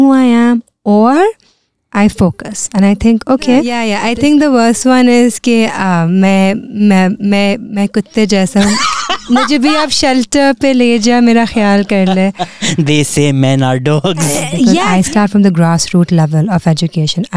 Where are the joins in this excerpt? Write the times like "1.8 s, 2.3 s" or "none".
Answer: 3.8 s, 14.8 s